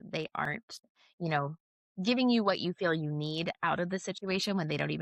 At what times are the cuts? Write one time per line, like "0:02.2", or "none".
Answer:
none